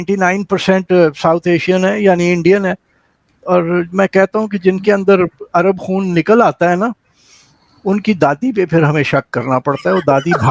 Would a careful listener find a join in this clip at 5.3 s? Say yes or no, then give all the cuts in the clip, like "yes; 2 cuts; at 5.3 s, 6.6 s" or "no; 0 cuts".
no; 0 cuts